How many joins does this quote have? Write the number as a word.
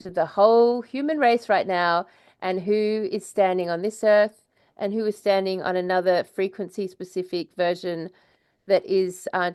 zero